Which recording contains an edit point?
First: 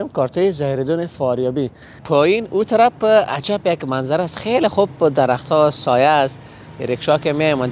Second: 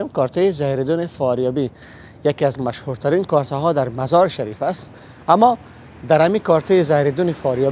first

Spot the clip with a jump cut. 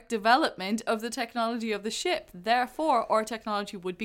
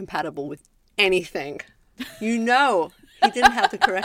second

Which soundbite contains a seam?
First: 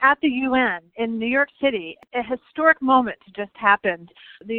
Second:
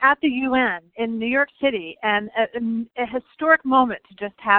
first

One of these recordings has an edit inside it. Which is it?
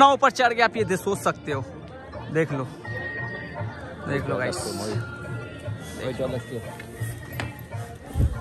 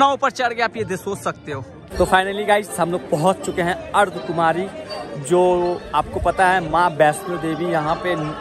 second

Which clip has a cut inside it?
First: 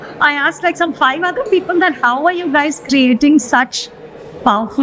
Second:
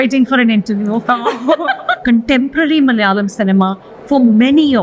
second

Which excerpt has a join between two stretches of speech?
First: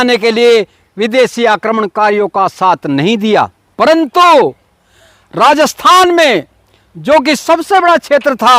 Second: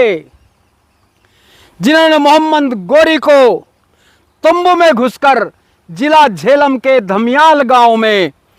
first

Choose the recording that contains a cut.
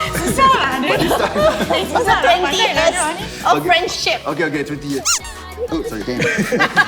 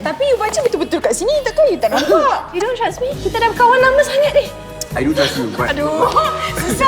second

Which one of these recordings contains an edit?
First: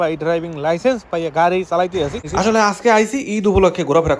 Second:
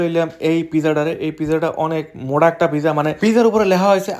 first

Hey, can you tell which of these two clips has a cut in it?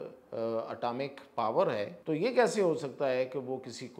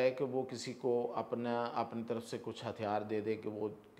first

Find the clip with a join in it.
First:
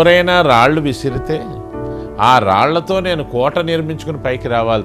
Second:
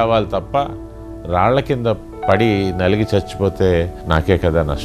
second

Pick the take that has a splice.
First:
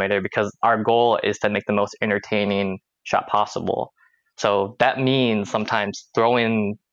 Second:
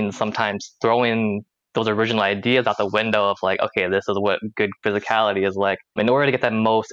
second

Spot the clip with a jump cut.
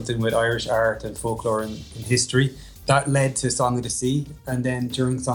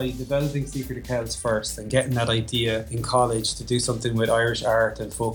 second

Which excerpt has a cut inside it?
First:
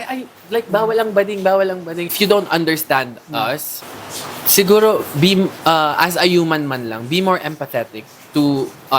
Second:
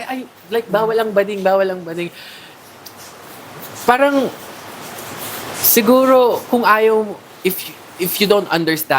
first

